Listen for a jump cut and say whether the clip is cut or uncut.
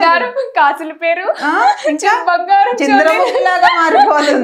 uncut